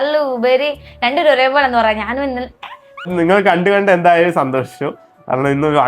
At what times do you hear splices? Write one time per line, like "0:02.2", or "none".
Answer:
0:03.1